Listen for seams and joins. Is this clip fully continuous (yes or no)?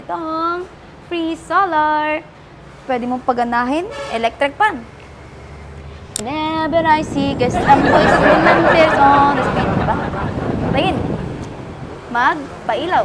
yes